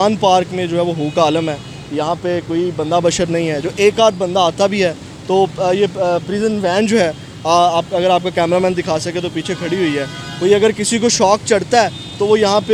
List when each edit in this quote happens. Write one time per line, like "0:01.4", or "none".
none